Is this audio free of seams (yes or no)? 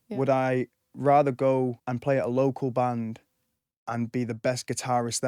no